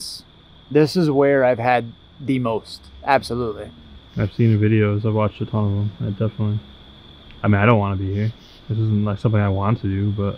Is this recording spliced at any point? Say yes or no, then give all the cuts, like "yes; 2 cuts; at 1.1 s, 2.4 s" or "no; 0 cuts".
no; 0 cuts